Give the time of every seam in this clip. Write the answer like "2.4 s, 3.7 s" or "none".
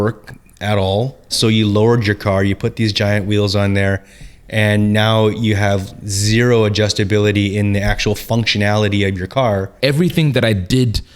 1.3 s, 9.7 s